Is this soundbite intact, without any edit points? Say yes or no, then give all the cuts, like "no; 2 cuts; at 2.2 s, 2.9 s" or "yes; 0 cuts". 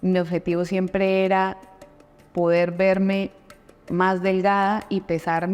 yes; 0 cuts